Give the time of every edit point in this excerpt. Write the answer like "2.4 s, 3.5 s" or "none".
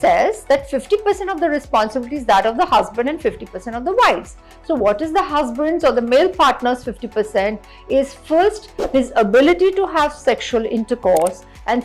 none

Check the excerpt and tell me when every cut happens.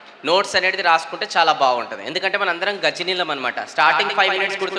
none

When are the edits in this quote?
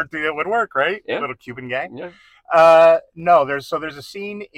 none

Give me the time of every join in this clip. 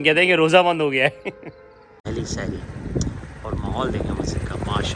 2.1 s

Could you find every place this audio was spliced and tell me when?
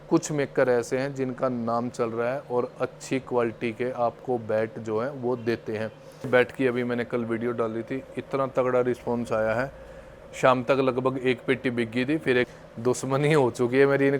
6.3 s, 12.5 s

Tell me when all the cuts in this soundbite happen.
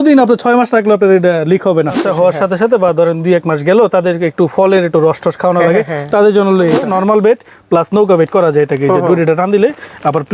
2.0 s, 6.8 s

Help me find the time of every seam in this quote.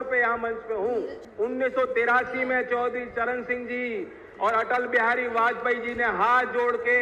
1.2 s

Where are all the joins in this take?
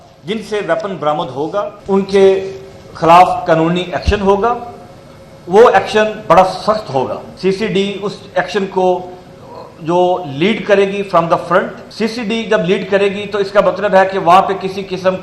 1.7 s, 7.2 s, 11.8 s

